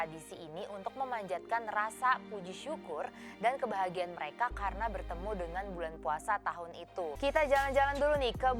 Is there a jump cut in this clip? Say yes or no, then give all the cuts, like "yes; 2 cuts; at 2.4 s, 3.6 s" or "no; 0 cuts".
yes; 1 cut; at 7.1 s